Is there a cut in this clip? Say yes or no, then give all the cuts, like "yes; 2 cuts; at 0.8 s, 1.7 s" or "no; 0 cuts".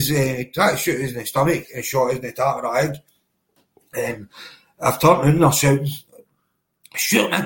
no; 0 cuts